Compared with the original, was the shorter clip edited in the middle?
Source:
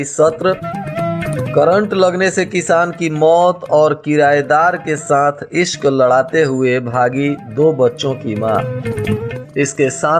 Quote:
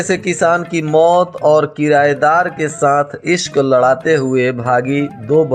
no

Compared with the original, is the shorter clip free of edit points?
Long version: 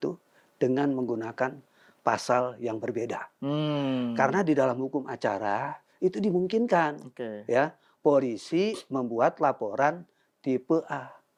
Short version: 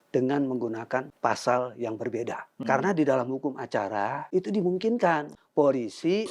no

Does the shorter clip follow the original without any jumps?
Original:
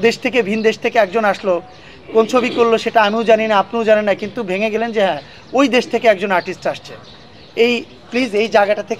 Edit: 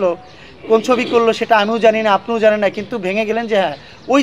yes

